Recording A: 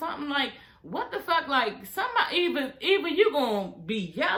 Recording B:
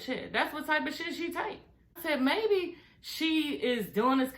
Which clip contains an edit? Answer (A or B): B